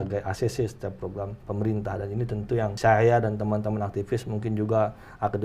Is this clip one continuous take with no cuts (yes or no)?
no